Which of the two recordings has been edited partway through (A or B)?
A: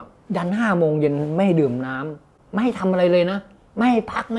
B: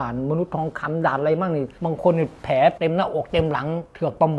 B